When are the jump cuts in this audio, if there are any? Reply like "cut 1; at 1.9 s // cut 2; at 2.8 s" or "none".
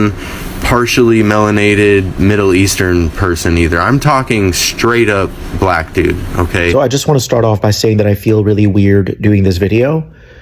cut 1; at 6.7 s